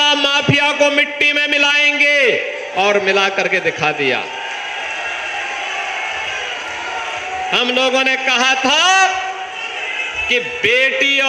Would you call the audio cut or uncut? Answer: uncut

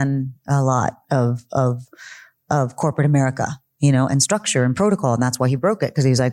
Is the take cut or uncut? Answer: uncut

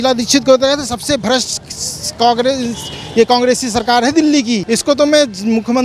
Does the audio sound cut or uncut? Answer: cut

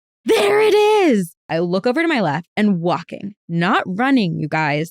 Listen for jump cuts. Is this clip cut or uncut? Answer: cut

